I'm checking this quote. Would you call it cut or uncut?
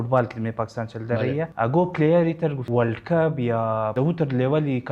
cut